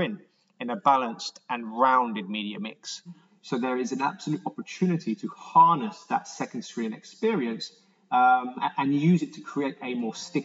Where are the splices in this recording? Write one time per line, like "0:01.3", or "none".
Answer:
0:03.2